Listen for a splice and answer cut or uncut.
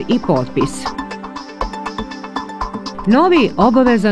uncut